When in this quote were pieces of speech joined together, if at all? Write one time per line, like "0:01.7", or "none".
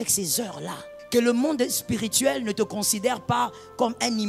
0:00.9